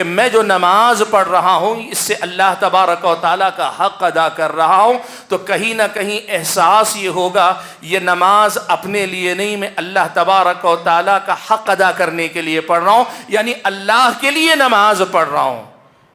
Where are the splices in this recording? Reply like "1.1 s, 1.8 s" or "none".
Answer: none

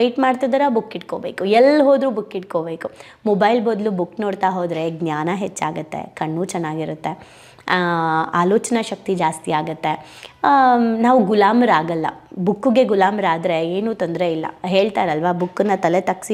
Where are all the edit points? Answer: none

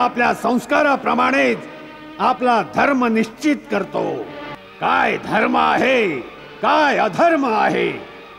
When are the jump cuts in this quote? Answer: 4.6 s

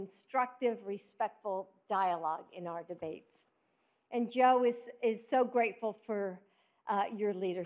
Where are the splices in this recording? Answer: 3.7 s

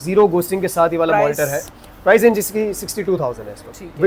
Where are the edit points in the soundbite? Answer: none

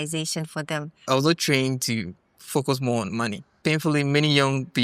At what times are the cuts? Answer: 0.9 s, 3.5 s

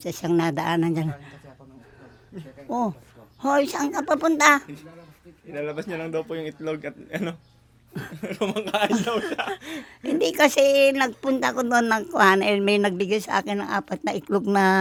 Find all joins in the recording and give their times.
none

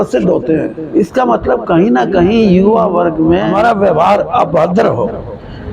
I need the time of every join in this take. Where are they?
3.5 s

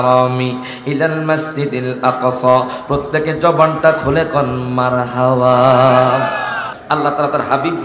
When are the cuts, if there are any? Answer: 6.7 s

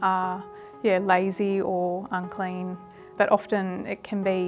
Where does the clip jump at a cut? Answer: 3.1 s

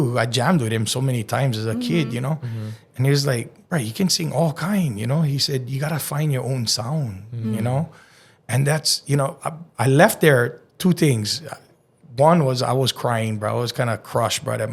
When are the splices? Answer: none

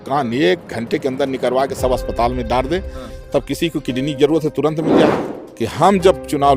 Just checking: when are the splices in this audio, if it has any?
5.3 s

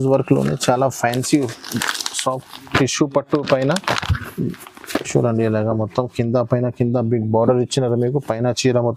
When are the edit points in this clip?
none

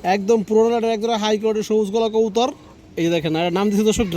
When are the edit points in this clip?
none

